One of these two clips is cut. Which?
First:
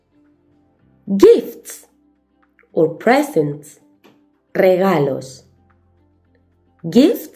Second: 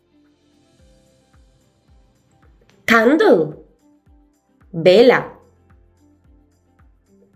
first; 1 cut; at 1.0 s

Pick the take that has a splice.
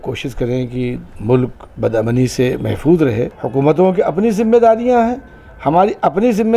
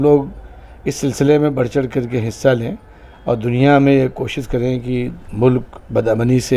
first; 1 cut; at 3.3 s

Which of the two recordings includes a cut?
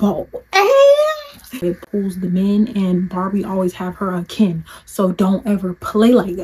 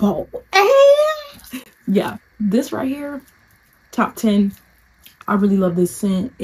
first; 1 cut; at 1.6 s

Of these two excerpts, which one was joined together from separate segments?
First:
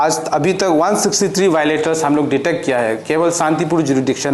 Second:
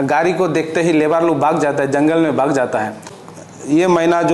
second; 1 cut; at 3.2 s

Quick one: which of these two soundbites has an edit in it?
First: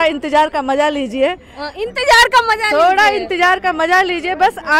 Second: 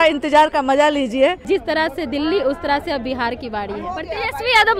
second; 1 cut; at 1.4 s

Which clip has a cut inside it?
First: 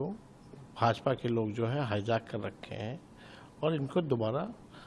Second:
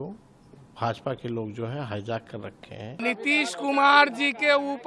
second; 1 cut; at 3.0 s

